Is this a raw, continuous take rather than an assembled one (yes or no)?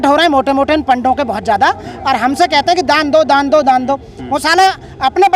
yes